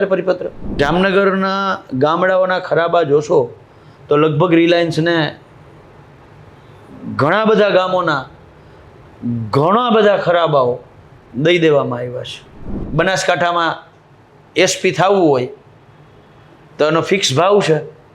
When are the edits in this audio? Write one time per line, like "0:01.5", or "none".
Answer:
0:00.8
0:12.8